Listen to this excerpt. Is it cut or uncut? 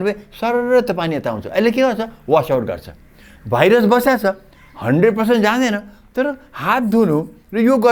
uncut